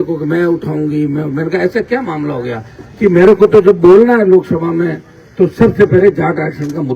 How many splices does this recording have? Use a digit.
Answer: 0